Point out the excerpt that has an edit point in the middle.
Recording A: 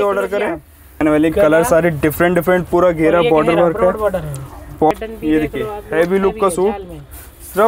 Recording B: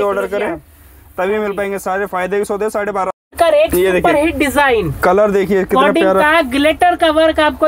A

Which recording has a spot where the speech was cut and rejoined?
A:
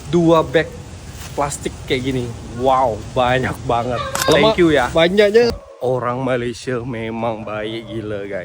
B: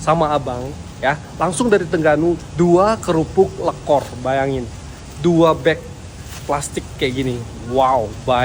A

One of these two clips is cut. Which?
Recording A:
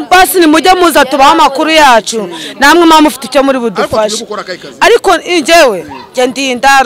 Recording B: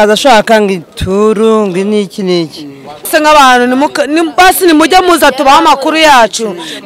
B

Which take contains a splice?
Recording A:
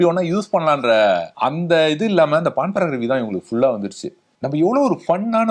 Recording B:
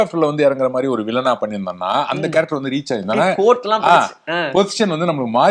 A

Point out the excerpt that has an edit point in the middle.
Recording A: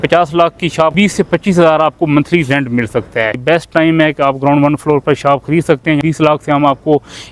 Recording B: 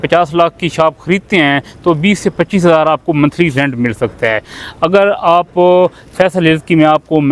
A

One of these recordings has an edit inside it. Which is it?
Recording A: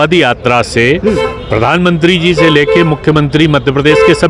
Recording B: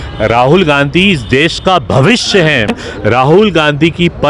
B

